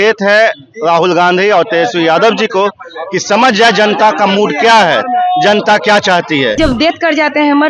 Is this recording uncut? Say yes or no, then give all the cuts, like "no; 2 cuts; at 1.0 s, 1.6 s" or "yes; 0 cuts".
no; 1 cut; at 6.6 s